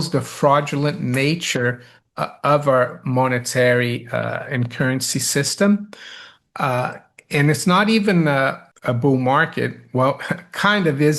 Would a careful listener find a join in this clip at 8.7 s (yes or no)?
yes